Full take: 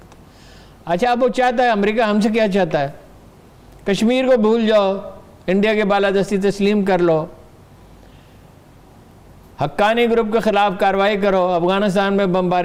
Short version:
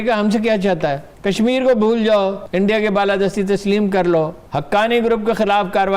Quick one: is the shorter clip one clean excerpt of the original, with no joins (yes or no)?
no